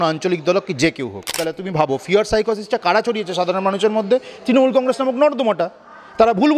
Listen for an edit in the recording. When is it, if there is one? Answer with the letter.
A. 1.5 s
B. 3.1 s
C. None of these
A